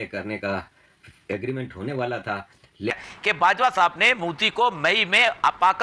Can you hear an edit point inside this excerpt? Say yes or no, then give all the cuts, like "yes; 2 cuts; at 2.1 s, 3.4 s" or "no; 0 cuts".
yes; 1 cut; at 3.0 s